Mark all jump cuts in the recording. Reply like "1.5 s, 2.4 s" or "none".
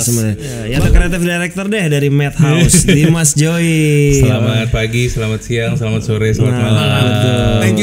1.0 s